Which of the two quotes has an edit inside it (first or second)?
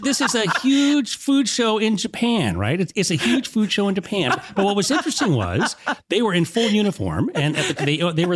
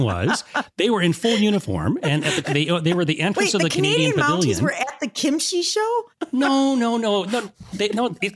second